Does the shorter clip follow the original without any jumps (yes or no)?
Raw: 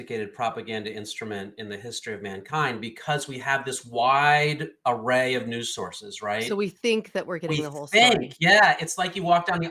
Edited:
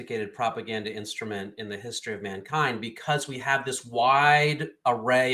yes